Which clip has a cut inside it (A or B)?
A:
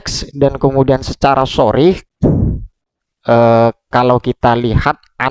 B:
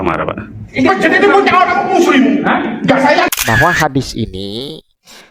B